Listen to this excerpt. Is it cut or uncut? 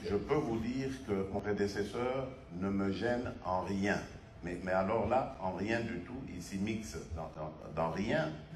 cut